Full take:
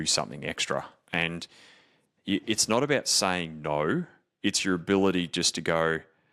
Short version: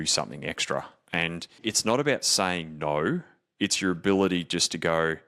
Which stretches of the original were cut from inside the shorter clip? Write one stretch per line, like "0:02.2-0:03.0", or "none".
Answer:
0:01.6-0:02.4

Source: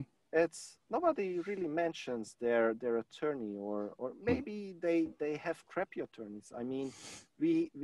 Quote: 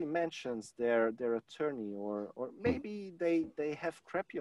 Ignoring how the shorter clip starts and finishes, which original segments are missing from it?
none

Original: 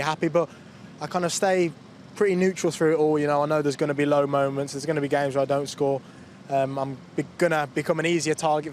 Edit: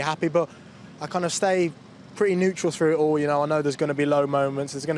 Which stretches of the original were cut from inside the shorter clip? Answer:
none

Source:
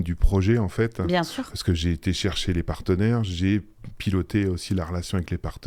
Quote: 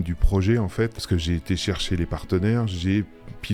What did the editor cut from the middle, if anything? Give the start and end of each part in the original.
0:01.0-0:01.5

